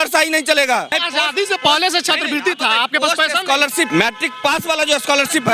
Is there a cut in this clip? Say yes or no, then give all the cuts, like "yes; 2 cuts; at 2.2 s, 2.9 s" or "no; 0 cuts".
yes; 2 cuts; at 1.0 s, 3.9 s